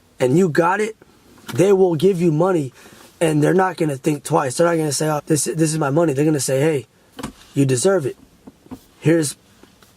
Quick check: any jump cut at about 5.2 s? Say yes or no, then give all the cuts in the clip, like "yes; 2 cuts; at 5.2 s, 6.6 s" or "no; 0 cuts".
yes; 1 cut; at 5.2 s